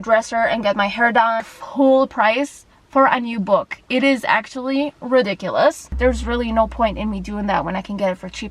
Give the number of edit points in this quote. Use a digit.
2